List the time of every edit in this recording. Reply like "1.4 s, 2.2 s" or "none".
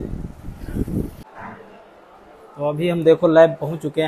1.2 s